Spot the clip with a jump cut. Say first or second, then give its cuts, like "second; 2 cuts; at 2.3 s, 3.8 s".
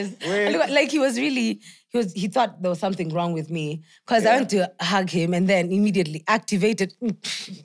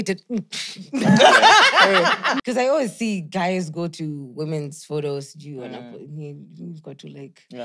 second; 1 cut; at 2.3 s